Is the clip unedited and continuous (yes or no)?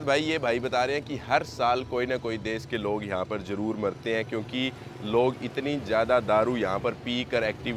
yes